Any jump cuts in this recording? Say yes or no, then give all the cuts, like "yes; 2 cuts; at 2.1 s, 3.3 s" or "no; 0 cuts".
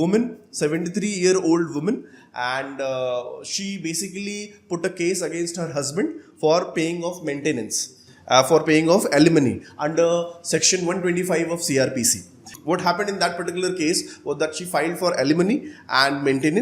no; 0 cuts